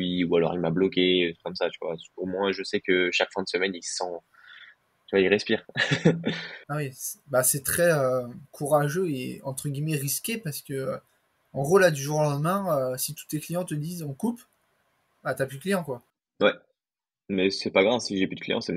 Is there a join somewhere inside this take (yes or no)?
yes